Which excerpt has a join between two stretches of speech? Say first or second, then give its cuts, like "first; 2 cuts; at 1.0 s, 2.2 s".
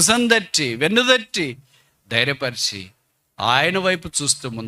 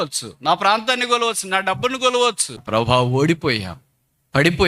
second; 1 cut; at 2.5 s